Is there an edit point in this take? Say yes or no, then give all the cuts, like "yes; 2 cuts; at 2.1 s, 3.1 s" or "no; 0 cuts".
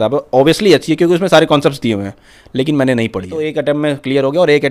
yes; 1 cut; at 3.3 s